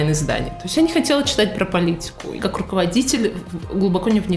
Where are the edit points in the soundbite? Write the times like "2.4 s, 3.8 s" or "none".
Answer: 2.4 s